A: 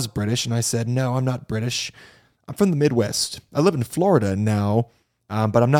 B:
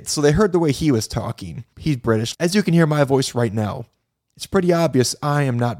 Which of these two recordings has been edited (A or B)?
B